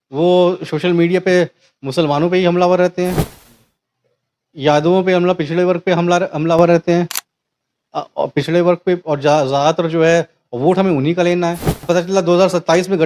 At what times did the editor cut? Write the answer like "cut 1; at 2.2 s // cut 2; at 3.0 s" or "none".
cut 1; at 11.8 s